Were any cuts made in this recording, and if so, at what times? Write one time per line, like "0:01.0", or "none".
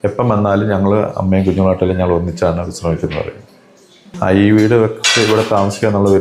0:04.1

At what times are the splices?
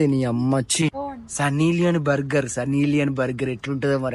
0:01.0

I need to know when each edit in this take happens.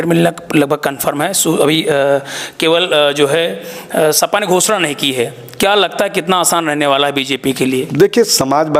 none

